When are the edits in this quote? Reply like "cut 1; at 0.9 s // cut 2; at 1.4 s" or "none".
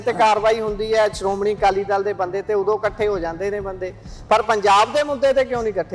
none